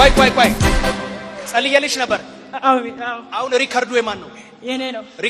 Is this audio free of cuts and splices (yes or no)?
yes